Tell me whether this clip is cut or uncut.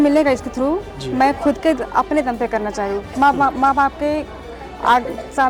uncut